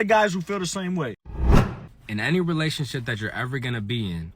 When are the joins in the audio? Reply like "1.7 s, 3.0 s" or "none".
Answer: 1.4 s